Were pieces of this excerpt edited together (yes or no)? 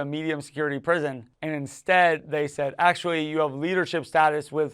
yes